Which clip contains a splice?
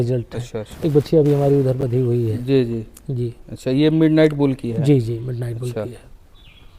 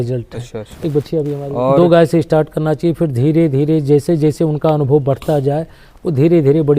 second; 1 cut; at 1.4 s

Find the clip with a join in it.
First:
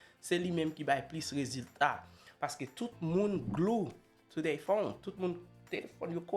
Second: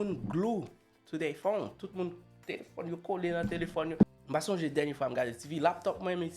second; 1 cut; at 4.0 s

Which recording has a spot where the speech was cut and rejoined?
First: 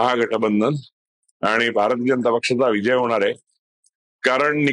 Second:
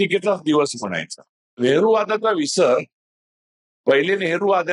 second; 1 cut; at 1.6 s

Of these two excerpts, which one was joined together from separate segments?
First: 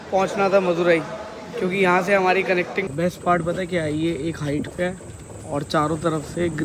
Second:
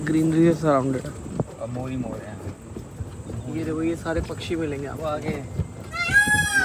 first; 1 cut; at 2.9 s

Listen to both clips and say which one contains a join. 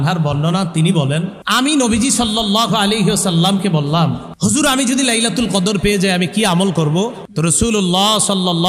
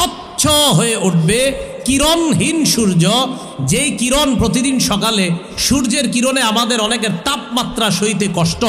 first; 3 cuts; at 1.4 s, 4.3 s, 7.2 s

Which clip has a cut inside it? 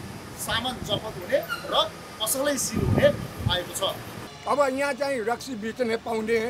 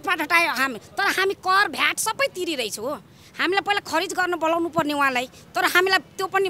first; 1 cut; at 4.2 s

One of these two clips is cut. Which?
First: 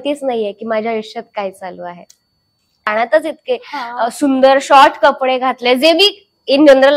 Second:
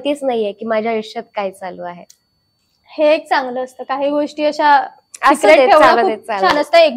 first; 1 cut; at 2.9 s

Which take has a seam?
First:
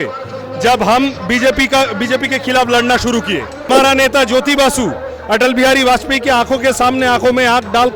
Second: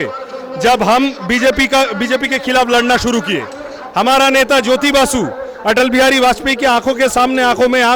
first; 1 cut; at 3.7 s

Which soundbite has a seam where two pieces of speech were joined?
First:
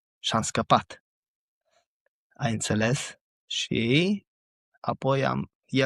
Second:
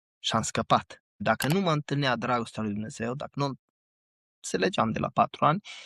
second; 1 cut; at 1.2 s

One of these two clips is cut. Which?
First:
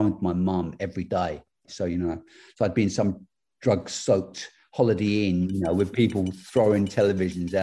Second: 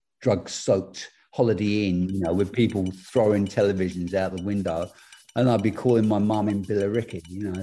first; 1 cut; at 1.7 s

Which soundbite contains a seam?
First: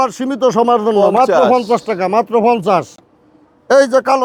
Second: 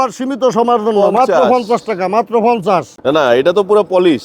second; 1 cut; at 3.0 s

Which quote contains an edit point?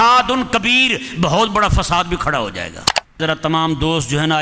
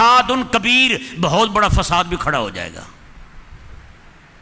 first; 1 cut; at 3.2 s

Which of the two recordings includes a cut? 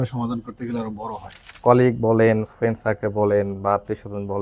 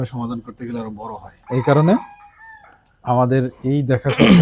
first; 1 cut; at 1.3 s

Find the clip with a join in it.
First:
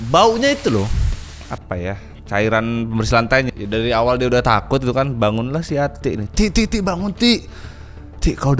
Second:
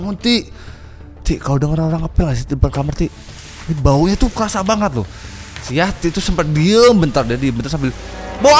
first; 1 cut; at 3.5 s

